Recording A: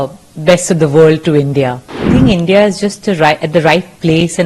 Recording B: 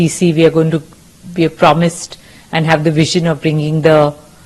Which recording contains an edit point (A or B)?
A